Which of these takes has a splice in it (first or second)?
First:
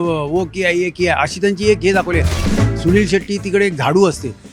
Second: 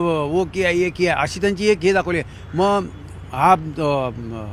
first